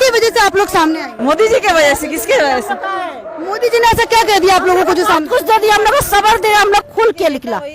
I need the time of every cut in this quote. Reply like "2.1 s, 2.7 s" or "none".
1.1 s, 6.8 s